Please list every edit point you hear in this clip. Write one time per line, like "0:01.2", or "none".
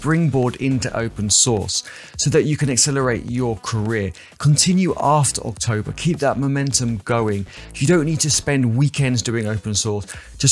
none